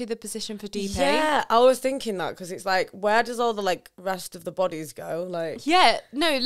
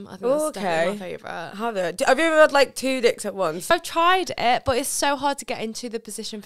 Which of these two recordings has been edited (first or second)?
second